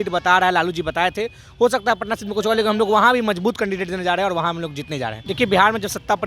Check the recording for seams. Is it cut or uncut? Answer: cut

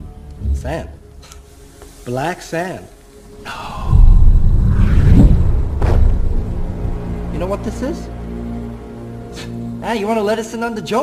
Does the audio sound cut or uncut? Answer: uncut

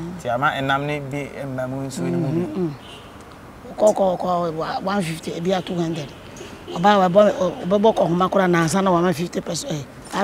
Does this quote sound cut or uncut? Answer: uncut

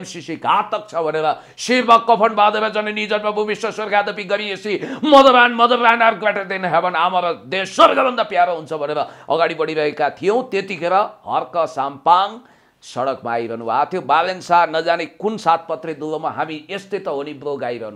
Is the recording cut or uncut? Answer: uncut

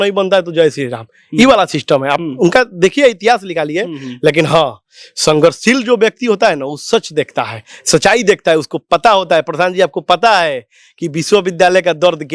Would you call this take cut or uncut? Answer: uncut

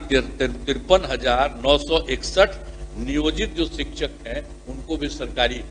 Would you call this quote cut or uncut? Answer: uncut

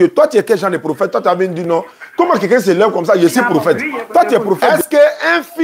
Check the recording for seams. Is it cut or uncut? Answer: cut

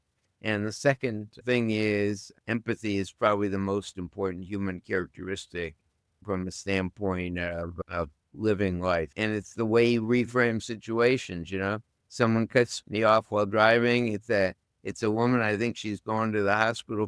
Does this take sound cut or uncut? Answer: cut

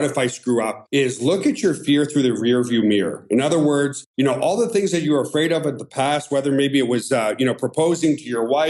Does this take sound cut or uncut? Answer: uncut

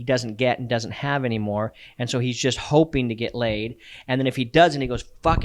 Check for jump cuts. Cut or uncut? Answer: uncut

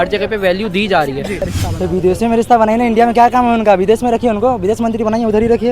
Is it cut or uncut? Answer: cut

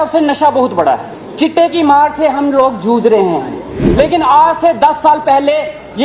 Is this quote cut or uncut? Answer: cut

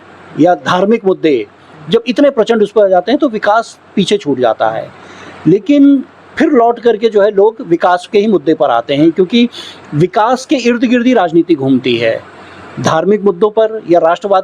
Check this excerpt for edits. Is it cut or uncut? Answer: uncut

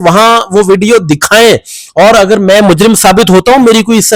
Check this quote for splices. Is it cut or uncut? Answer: uncut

